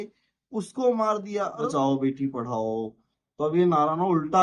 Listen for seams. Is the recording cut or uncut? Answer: cut